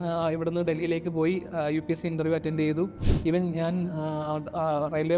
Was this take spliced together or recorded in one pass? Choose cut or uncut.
cut